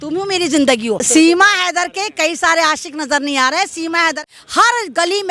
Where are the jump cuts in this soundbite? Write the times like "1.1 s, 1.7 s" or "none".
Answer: 1.1 s, 4.2 s